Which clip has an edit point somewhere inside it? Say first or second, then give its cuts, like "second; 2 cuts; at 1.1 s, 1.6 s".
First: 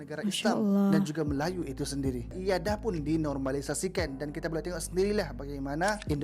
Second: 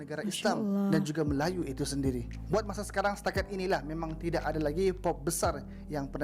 first; 1 cut; at 2.4 s